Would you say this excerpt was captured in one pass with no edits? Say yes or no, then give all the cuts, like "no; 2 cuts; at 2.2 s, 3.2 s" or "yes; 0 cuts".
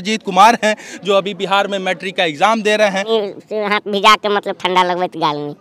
no; 1 cut; at 3.1 s